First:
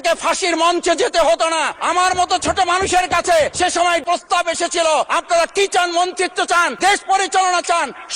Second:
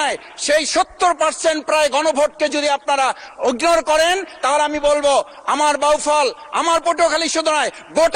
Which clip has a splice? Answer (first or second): first